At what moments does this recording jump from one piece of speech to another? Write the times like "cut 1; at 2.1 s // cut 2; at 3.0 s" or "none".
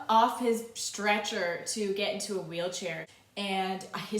cut 1; at 3.1 s